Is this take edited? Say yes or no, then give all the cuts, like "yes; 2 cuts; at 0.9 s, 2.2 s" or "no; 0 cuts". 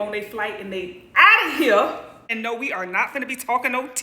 yes; 1 cut; at 2.3 s